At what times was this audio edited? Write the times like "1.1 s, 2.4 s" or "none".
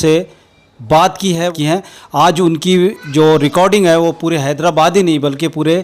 1.5 s